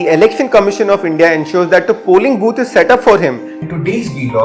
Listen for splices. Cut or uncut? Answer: cut